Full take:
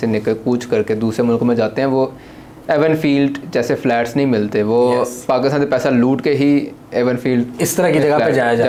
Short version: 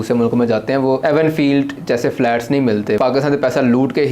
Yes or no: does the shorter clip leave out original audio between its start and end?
yes